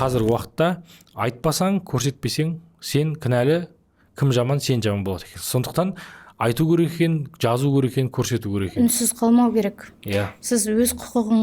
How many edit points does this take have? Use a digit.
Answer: 0